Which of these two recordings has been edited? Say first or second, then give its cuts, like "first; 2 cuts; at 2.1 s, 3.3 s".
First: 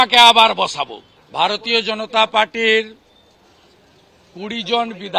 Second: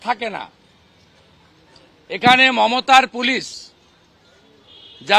first; 1 cut; at 1.2 s